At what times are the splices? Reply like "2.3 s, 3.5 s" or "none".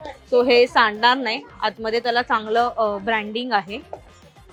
none